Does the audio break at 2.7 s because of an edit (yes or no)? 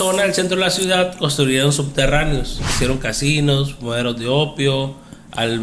yes